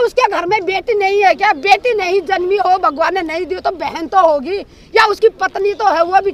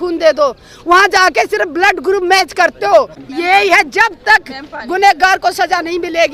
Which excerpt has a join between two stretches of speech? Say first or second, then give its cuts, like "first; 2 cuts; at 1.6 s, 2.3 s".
second; 1 cut; at 3.2 s